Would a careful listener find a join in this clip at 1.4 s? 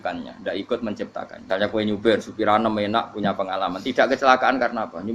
yes; 1 cut; at 1.4 s

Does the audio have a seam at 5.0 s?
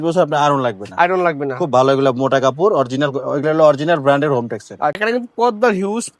yes; 1 cut; at 5.0 s

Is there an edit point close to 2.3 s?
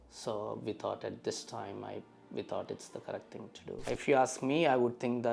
no; 1 cut; at 3.9 s

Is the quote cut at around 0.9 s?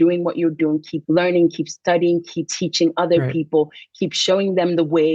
yes; 2 cuts; at 0.9 s, 2.5 s

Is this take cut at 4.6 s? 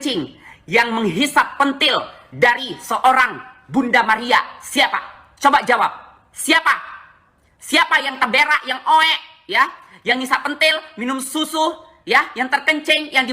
yes; 1 cut; at 4.6 s

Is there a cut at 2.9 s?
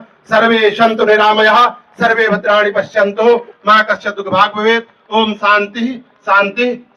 no; 0 cuts

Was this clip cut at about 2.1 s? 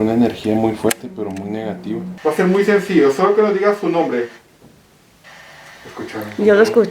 yes; 1 cut; at 2.1 s

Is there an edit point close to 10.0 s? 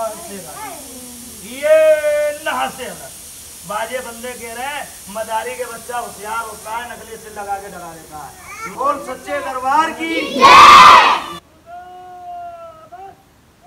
no; 1 cut; at 8.7 s

